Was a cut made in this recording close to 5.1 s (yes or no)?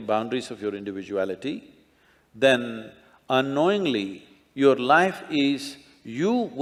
no